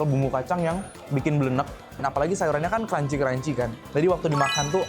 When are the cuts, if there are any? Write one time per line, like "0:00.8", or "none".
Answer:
0:00.9
0:01.8

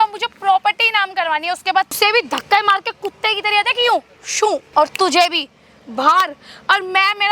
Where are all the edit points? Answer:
0:02.0
0:04.7

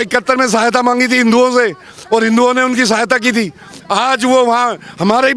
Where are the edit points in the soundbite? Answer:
none

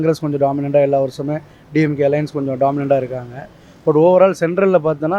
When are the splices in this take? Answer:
none

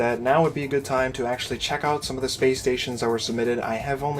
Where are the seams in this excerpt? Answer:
0:01.1

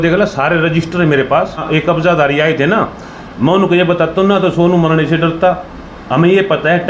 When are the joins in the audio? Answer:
0:01.6

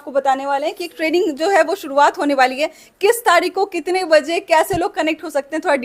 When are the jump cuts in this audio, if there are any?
none

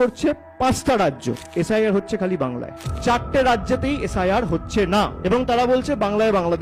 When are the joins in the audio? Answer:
0:02.8

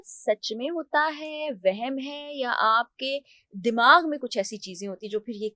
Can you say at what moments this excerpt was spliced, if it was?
none

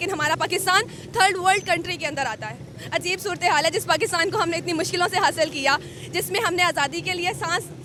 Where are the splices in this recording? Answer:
none

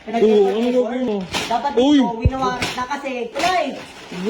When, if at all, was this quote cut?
0:01.1

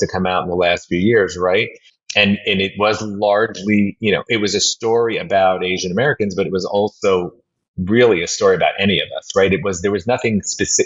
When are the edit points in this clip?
none

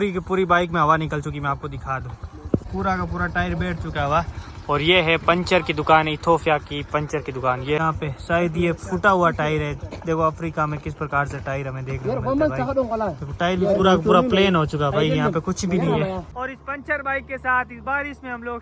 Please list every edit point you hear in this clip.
0:02.6
0:07.8
0:16.3

